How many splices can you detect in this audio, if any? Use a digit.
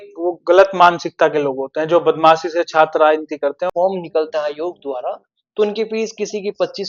1